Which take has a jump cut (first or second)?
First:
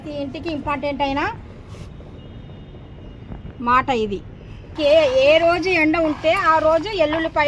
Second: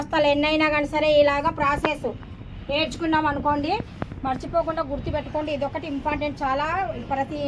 first